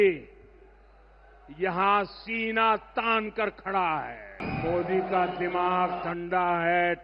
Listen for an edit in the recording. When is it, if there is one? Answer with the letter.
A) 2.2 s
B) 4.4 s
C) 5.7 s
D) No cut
B